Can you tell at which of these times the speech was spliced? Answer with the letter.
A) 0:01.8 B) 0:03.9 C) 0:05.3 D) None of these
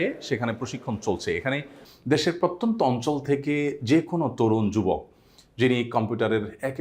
A